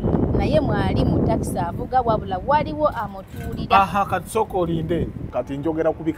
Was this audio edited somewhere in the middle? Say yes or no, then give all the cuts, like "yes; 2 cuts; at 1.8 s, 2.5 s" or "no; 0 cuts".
yes; 1 cut; at 5.2 s